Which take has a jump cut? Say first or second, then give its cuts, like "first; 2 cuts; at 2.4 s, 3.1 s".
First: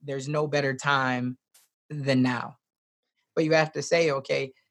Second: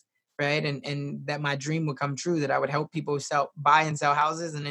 first; 1 cut; at 3.2 s